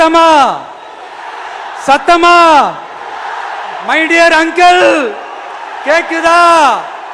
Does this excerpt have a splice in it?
no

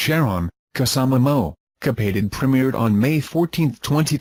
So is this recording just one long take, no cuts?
yes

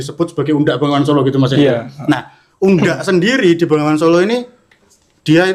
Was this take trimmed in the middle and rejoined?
no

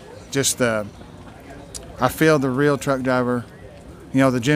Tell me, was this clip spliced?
no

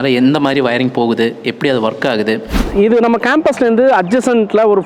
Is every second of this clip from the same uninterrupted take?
no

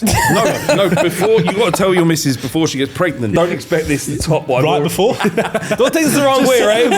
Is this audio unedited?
no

